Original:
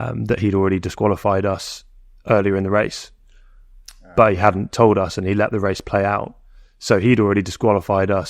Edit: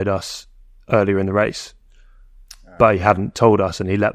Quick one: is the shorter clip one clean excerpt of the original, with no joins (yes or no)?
yes